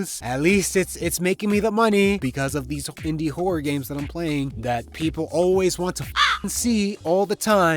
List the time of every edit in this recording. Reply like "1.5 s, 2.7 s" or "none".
2.2 s, 4.5 s